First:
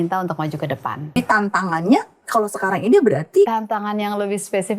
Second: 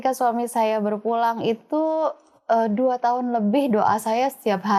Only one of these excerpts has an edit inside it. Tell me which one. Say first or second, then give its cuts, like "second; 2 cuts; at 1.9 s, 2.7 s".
first; 2 cuts; at 1.1 s, 3.5 s